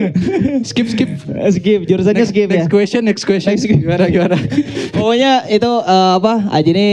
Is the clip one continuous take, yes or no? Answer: yes